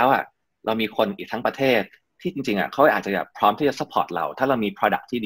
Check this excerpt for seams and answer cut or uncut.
uncut